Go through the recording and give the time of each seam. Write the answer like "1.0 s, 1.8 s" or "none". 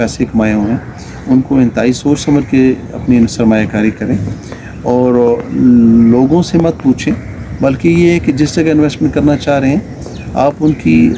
none

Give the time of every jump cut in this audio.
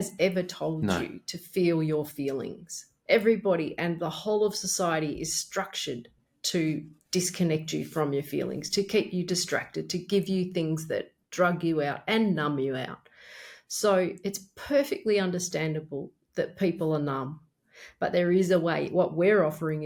none

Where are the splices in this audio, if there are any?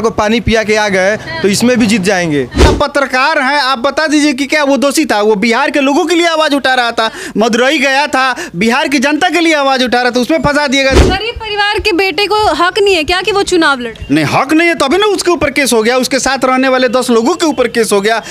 2.7 s, 11.0 s

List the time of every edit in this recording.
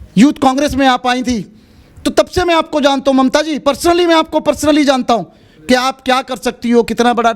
none

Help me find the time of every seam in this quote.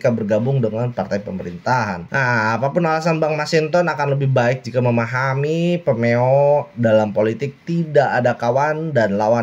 none

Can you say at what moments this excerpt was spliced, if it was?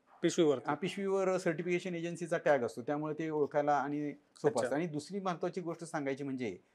none

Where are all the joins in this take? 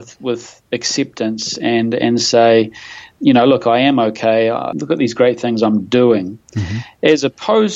3.1 s, 4.7 s

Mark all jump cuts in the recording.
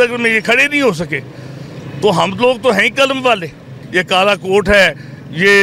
none

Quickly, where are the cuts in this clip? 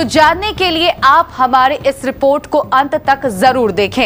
none

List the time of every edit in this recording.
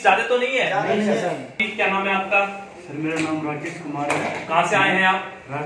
1.6 s

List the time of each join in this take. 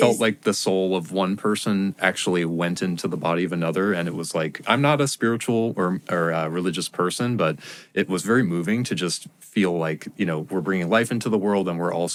none

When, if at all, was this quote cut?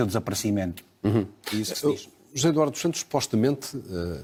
none

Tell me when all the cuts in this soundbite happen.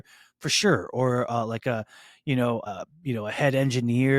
2.6 s

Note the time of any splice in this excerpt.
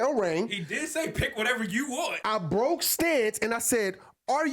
2.2 s

